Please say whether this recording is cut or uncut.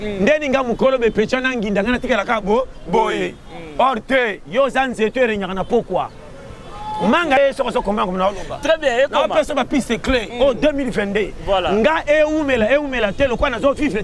cut